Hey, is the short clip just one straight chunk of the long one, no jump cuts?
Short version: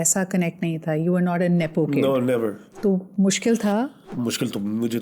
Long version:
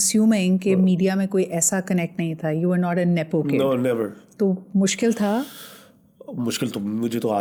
no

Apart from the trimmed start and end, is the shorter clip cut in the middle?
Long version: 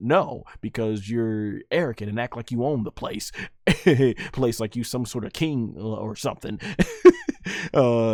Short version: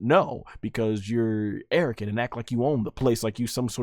yes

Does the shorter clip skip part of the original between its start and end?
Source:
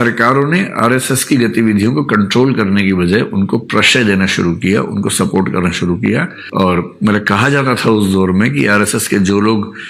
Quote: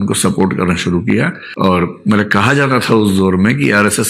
no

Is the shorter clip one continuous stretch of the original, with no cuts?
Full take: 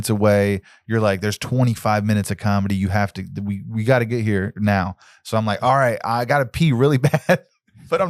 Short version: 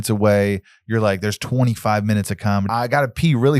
no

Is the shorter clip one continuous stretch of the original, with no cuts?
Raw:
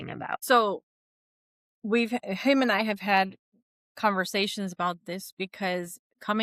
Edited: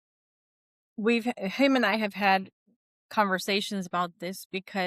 yes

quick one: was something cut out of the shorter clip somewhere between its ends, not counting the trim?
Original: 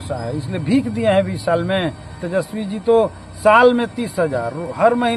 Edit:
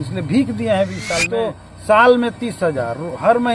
yes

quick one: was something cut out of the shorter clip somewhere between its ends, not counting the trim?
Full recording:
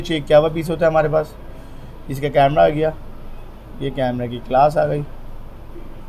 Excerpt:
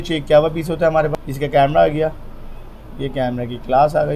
yes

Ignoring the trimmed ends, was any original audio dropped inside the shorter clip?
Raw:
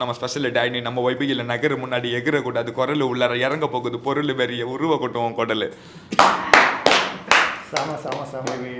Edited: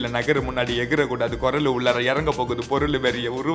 no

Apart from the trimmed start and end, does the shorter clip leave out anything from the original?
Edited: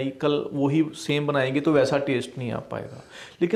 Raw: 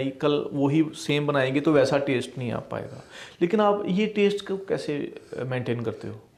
no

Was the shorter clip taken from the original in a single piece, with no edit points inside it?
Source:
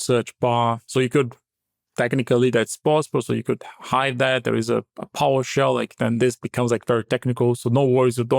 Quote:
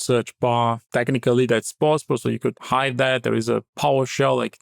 no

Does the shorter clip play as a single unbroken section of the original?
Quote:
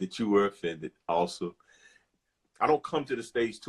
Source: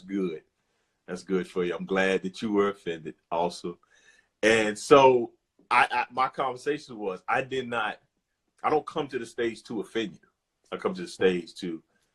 no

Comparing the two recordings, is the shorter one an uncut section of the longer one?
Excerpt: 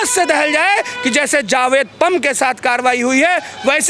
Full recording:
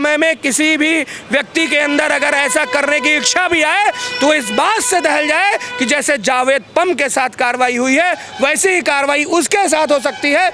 yes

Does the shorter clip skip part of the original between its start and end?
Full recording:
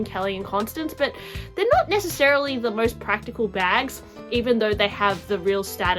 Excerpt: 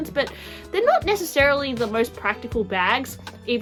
no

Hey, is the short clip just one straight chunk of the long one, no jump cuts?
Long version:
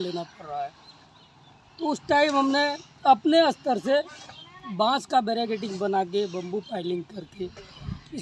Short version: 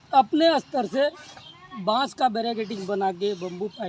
yes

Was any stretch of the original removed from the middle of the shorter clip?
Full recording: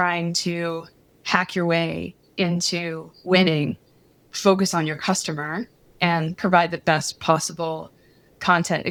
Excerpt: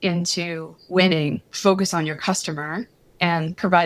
yes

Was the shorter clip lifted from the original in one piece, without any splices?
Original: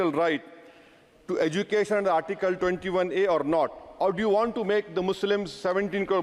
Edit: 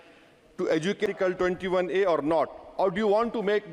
no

